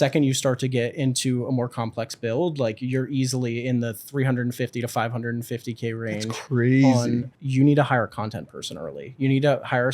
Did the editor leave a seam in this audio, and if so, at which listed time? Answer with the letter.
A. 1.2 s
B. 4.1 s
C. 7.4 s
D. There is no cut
C